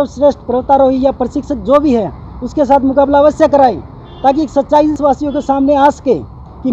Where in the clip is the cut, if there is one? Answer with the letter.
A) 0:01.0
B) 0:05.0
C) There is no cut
B